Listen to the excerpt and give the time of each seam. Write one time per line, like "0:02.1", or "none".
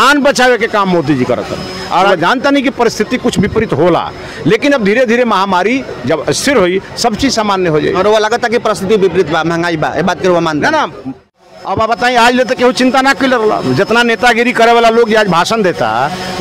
0:02.1
0:11.0